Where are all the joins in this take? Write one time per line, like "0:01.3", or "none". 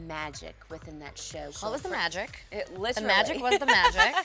none